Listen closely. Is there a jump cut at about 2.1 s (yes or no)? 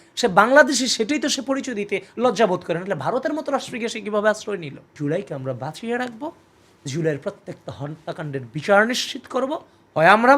no